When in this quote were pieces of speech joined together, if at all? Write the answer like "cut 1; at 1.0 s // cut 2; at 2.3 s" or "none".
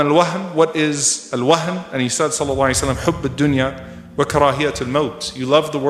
none